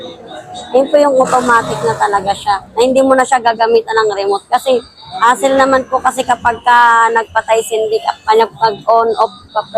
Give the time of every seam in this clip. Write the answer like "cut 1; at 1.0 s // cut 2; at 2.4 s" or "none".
none

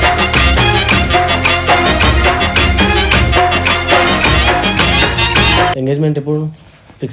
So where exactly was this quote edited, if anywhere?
cut 1; at 5.8 s

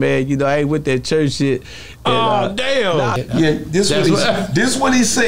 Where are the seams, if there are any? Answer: cut 1; at 3.1 s

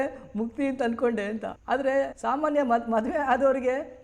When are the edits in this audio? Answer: cut 1; at 2.0 s

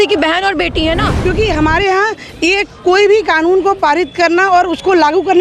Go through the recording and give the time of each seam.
cut 1; at 1.1 s

